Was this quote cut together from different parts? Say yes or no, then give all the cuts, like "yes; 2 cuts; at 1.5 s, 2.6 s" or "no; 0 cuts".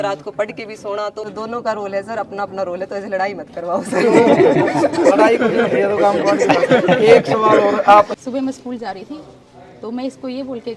yes; 2 cuts; at 1.3 s, 8.1 s